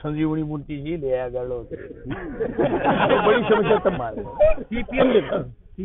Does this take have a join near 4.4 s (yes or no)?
no